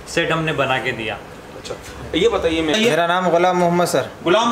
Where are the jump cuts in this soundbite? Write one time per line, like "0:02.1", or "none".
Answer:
0:02.7